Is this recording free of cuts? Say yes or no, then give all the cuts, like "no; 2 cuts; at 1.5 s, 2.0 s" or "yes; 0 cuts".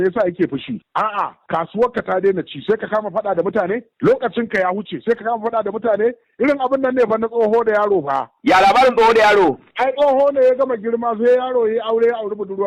yes; 0 cuts